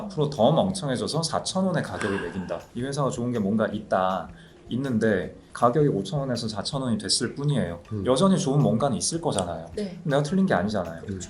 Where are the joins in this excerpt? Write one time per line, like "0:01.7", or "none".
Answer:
0:02.6